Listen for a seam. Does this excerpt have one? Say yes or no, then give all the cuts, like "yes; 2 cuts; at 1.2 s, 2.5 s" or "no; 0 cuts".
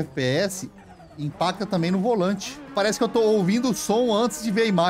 yes; 1 cut; at 2.7 s